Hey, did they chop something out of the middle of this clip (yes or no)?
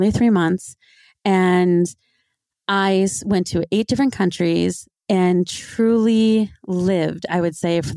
no